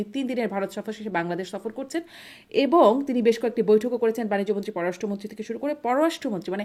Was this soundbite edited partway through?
no; 0 cuts

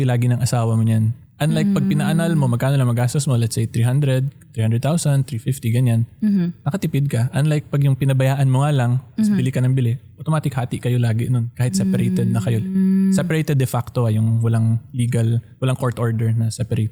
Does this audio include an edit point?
no; 0 cuts

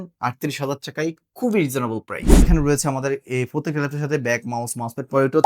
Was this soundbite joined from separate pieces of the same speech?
yes; 1 cut; at 2.5 s

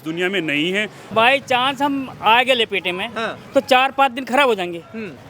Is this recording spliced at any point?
yes; 1 cut; at 1.0 s

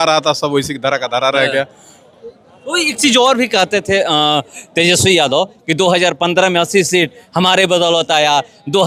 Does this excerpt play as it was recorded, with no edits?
yes; 0 cuts

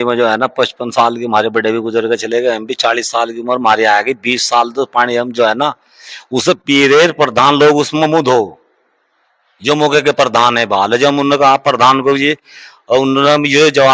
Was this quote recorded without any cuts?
yes; 0 cuts

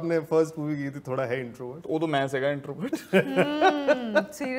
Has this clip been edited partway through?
no; 0 cuts

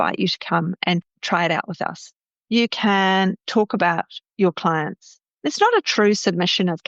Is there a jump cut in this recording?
yes; 2 cuts; at 1.1 s, 2.3 s

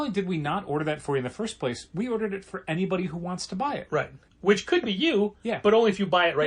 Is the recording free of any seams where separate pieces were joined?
no; 1 cut; at 4.3 s

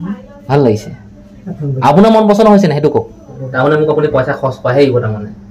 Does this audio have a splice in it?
yes; 1 cut; at 3.3 s

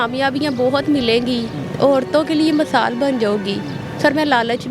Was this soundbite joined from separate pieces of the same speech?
no; 0 cuts

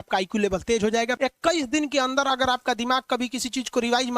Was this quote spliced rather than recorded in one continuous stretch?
yes; 1 cut; at 1.1 s

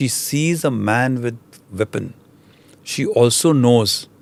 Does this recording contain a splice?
no; 0 cuts

